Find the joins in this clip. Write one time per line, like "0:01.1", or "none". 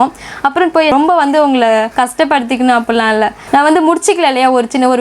0:00.9
0:01.9
0:03.4